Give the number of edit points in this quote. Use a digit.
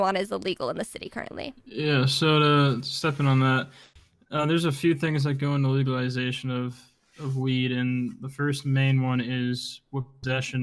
0